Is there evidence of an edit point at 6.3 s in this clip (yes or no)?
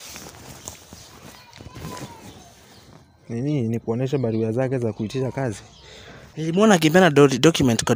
yes